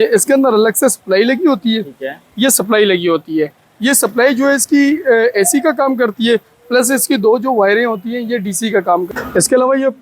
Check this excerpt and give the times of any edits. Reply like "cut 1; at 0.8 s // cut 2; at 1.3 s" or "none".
cut 1; at 9.1 s

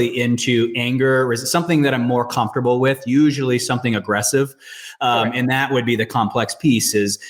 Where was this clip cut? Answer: none

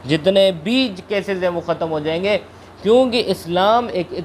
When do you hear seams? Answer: none

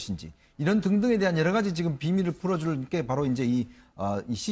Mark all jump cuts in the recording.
cut 1; at 1.7 s

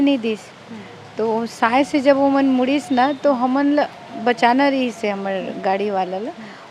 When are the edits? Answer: none

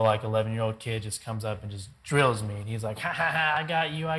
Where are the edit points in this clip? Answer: none

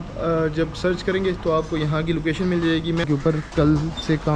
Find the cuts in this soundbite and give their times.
cut 1; at 3.1 s

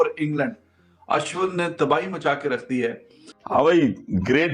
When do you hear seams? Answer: cut 1; at 3.5 s

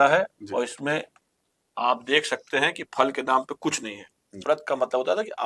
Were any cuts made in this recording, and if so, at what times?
cut 1; at 4.4 s

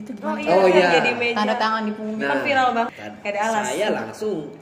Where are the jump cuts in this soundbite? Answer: cut 1; at 2.9 s

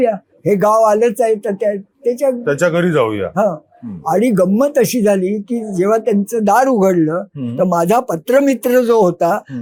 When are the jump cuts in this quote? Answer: none

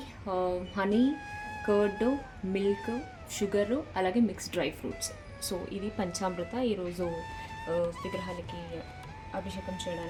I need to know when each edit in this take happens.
none

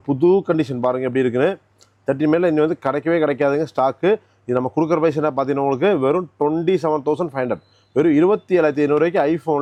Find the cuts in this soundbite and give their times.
none

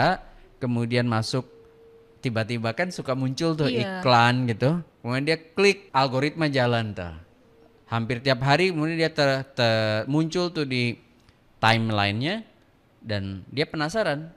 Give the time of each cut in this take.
cut 1; at 5.8 s

